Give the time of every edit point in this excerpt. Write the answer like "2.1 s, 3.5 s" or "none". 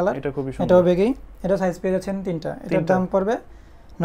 none